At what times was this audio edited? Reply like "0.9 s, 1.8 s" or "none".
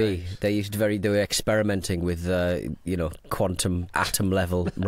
3.9 s